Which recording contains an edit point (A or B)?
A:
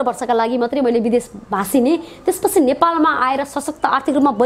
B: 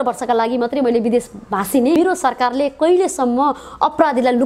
B